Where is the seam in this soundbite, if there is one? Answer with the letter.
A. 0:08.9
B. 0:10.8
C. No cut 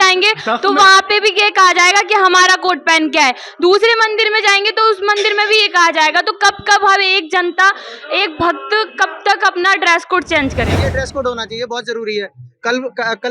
B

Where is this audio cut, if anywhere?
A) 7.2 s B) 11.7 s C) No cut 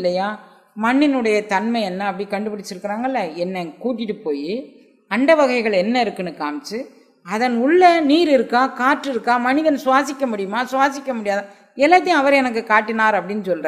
C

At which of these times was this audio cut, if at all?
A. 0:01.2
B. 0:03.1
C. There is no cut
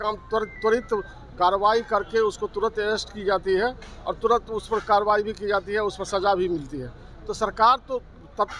C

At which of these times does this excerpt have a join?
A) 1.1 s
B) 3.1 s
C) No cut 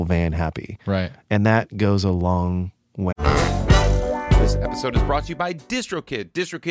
B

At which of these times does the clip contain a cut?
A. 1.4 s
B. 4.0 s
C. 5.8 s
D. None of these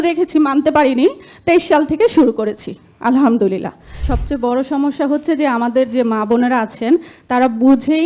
B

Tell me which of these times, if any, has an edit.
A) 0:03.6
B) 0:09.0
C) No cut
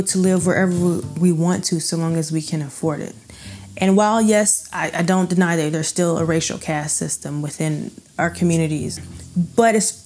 B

